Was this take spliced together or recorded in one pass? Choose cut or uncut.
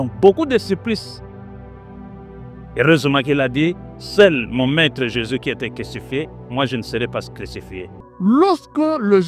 cut